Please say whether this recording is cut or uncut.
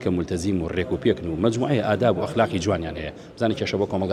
uncut